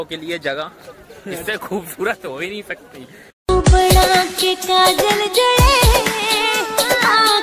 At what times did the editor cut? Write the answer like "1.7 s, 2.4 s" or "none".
none

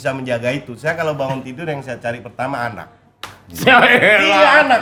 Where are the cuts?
none

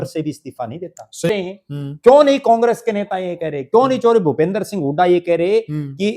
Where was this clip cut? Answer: 1.3 s

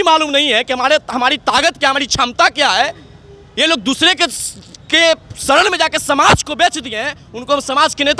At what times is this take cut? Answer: none

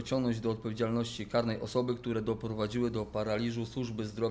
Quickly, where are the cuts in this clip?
none

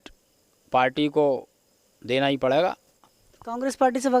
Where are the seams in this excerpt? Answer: 2.9 s

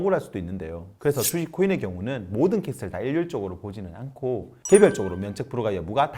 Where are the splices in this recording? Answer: 4.6 s

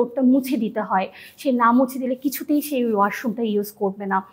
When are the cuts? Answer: none

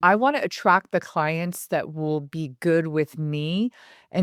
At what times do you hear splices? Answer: none

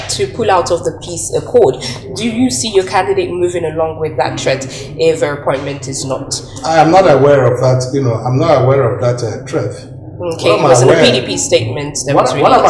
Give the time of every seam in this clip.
none

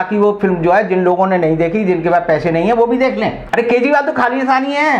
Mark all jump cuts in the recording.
3.4 s

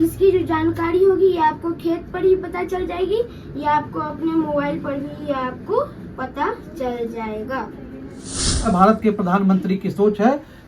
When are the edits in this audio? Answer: 8.7 s

